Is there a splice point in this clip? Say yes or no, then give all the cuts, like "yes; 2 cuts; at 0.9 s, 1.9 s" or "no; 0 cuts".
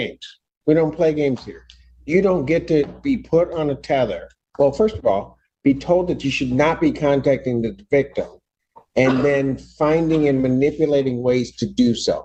no; 0 cuts